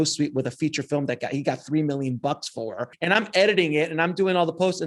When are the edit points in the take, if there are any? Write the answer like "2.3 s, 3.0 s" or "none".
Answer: 2.8 s